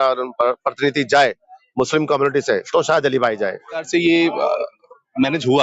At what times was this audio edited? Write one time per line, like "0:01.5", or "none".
0:03.9